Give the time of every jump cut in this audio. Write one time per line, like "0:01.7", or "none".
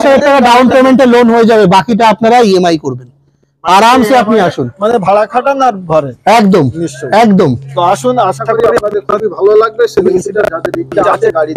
none